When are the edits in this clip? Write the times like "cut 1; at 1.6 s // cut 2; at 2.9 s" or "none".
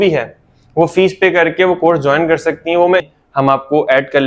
cut 1; at 3.1 s